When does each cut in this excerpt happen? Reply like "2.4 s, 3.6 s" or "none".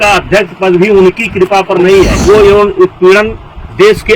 2.2 s